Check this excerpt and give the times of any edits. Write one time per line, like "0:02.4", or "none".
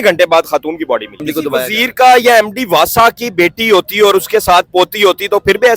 0:01.2